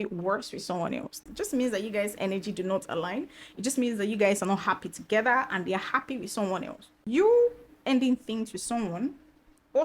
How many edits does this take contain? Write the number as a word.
two